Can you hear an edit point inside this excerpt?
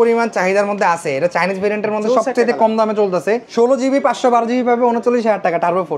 yes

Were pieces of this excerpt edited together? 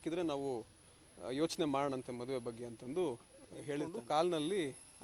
yes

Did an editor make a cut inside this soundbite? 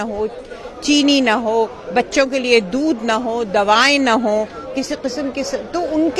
no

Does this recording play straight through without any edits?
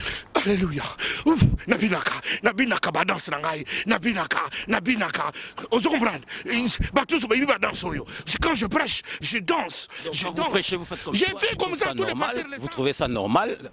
no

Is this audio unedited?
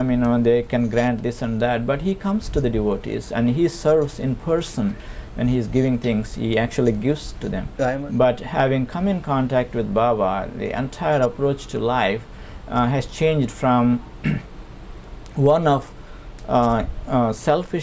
no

